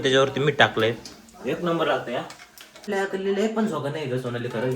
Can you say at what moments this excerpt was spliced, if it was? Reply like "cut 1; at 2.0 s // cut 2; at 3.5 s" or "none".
cut 1; at 2.9 s

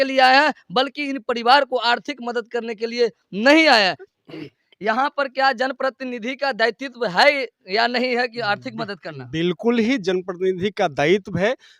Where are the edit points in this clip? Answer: cut 1; at 4.0 s

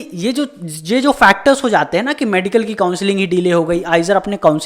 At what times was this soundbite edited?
none

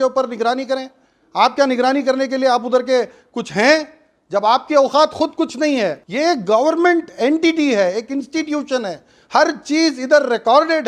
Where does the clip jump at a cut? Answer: cut 1; at 6.0 s

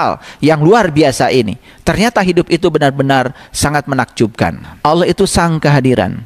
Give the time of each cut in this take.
cut 1; at 4.7 s

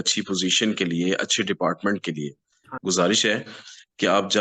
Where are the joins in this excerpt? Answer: cut 1; at 2.6 s

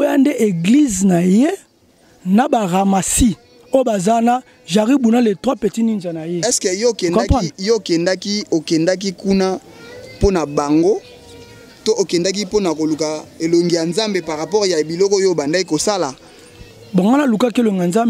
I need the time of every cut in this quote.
none

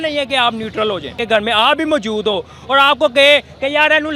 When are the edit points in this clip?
cut 1; at 1.2 s

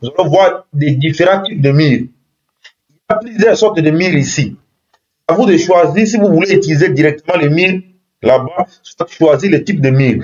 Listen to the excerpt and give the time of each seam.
none

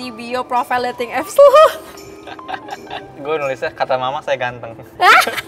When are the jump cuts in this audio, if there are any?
cut 1; at 2.9 s

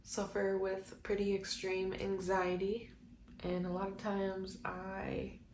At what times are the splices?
cut 1; at 3.3 s

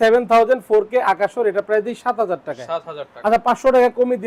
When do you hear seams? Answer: none

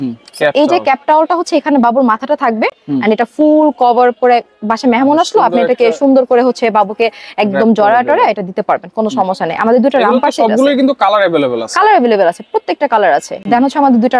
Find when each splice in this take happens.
none

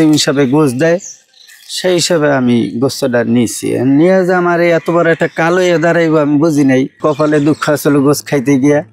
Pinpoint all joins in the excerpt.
cut 1; at 7.0 s

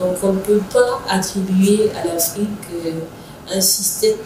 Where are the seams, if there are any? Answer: none

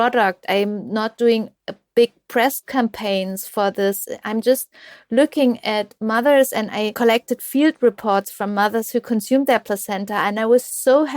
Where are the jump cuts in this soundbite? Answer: cut 1; at 6.9 s

